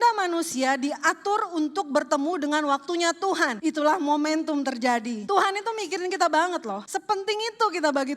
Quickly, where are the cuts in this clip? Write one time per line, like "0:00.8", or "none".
0:03.5
0:05.2
0:06.8